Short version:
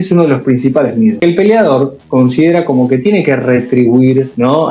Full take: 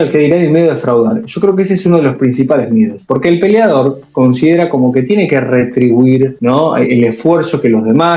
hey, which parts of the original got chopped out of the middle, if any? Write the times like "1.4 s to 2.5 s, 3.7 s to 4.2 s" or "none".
2.9 s to 3.2 s